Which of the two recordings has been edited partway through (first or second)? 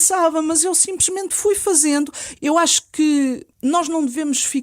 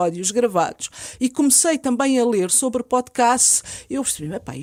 first